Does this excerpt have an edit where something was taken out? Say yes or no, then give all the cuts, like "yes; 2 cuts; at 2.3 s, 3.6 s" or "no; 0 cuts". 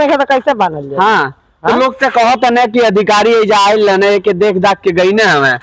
no; 0 cuts